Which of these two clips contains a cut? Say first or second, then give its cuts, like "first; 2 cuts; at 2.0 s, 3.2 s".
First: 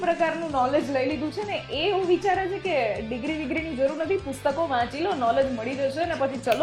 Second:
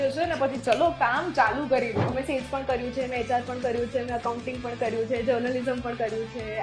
second; 1 cut; at 2.2 s